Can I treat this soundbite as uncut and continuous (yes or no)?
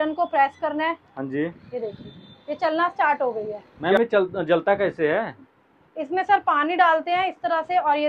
no